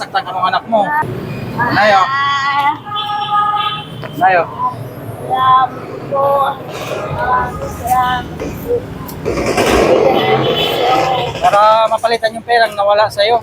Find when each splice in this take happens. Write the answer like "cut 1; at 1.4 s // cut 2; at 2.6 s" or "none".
cut 1; at 1.1 s